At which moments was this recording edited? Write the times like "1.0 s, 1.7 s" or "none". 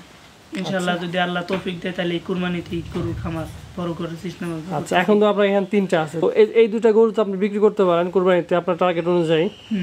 6.2 s